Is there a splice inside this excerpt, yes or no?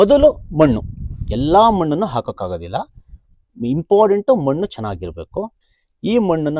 no